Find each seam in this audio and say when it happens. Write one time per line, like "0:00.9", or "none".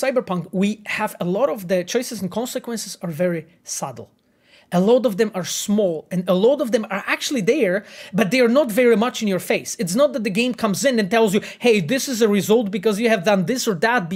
none